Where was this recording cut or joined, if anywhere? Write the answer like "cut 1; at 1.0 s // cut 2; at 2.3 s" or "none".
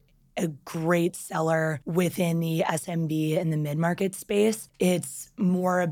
cut 1; at 1.8 s // cut 2; at 4.7 s